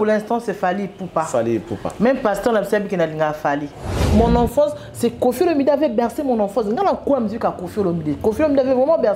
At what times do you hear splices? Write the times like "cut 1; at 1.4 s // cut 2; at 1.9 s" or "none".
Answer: cut 1; at 4.0 s